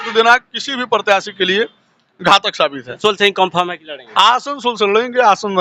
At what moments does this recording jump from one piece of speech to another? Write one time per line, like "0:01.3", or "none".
0:03.0